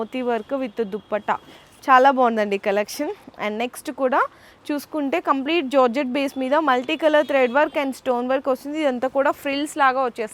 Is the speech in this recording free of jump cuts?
yes; 0 cuts

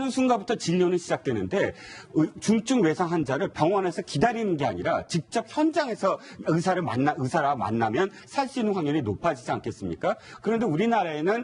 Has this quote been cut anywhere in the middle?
yes; 1 cut; at 3.4 s

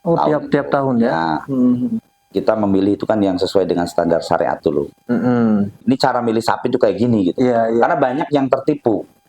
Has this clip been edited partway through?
yes; 2 cuts; at 2.1 s, 5.8 s

